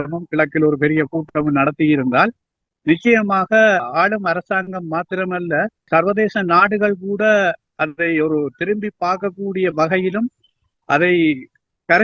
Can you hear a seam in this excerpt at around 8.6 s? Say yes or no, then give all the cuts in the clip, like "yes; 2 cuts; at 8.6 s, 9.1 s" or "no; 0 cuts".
no; 2 cuts; at 3.9 s, 5.9 s